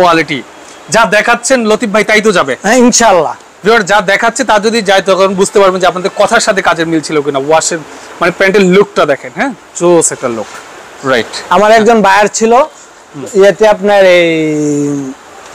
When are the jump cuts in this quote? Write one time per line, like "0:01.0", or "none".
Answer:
none

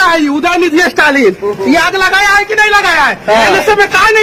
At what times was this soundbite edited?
none

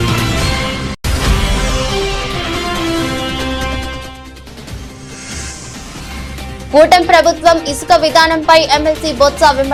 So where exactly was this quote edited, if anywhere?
none

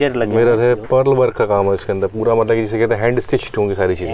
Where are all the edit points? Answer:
none

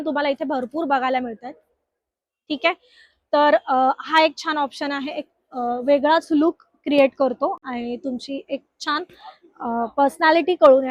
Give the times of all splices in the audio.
none

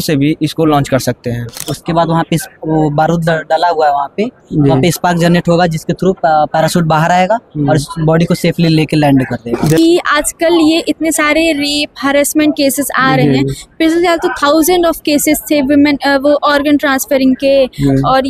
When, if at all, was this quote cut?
0:01.6
0:09.8

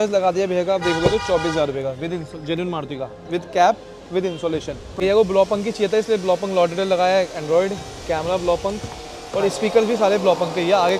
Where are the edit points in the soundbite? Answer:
0:04.9

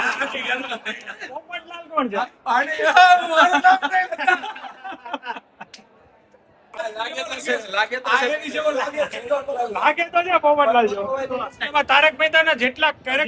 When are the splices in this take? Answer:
0:06.8
0:11.6

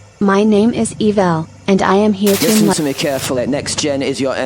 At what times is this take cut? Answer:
0:02.7

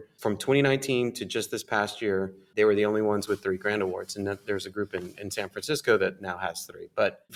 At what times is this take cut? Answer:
none

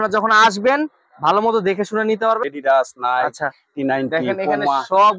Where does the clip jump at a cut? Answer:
0:02.5

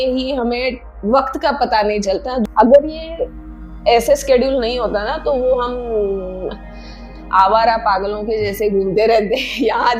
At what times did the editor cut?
0:02.4

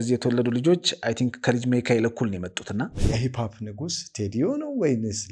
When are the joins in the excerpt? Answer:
0:03.0

